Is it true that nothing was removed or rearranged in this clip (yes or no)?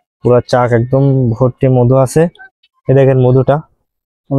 no